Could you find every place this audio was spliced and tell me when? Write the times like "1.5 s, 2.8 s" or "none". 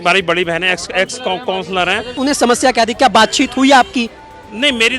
2.1 s

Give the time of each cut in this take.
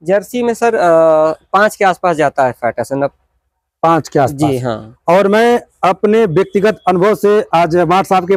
none

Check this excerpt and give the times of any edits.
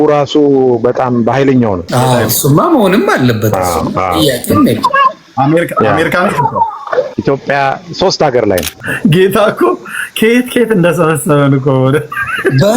1.8 s, 7.1 s, 8.8 s

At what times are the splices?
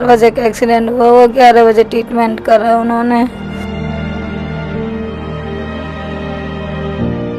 3.4 s

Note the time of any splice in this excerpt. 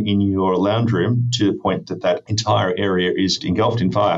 2.3 s, 3.4 s

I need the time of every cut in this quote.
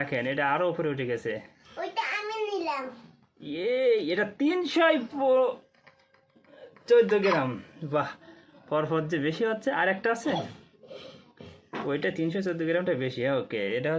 none

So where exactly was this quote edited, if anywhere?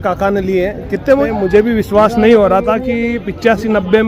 1.3 s

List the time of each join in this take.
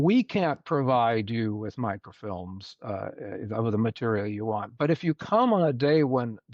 none

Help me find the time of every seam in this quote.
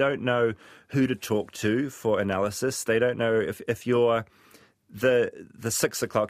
none

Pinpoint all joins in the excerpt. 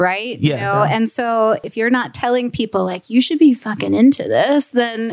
1.6 s

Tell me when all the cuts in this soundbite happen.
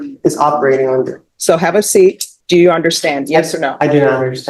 1.2 s, 2.3 s

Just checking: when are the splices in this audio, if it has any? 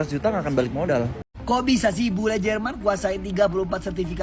1.3 s

